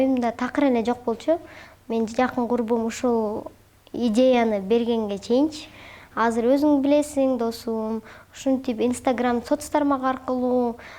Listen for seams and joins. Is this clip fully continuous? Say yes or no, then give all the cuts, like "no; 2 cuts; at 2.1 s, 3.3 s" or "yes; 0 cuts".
yes; 0 cuts